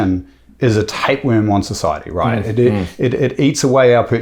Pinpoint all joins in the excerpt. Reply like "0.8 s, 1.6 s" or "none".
none